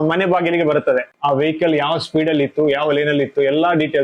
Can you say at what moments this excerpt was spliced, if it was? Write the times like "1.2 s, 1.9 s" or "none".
1.1 s